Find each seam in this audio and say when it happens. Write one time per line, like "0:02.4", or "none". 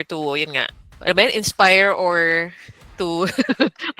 0:01.0